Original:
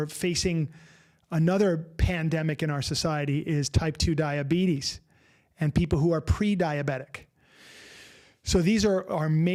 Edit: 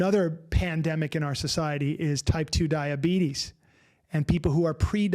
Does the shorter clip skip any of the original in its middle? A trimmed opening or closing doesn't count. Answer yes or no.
no